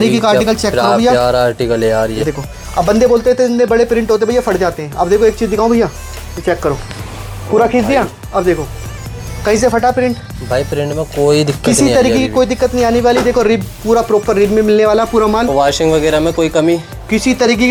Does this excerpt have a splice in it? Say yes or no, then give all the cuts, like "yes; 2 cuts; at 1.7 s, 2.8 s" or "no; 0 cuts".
no; 0 cuts